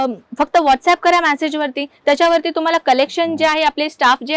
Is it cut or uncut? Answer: uncut